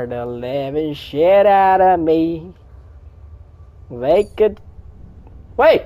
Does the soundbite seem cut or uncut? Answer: uncut